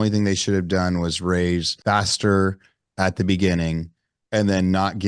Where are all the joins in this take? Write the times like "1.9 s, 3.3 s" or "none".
1.7 s